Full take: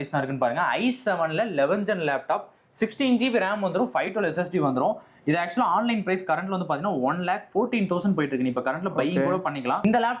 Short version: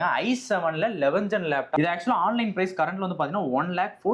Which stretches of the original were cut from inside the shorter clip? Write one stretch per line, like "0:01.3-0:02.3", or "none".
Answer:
0:02.3-0:05.2